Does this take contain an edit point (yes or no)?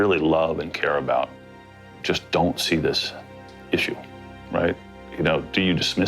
no